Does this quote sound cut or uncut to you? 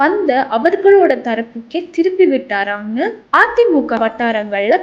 uncut